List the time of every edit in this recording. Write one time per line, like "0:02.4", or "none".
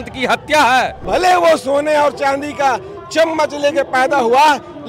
0:01.0